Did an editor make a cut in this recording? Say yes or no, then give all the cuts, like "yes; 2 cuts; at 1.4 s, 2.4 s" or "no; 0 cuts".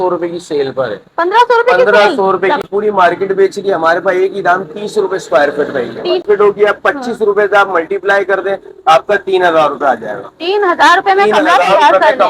yes; 2 cuts; at 2.7 s, 6.2 s